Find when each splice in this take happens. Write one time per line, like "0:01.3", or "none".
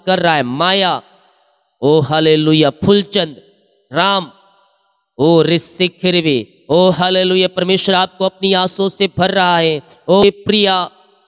0:10.2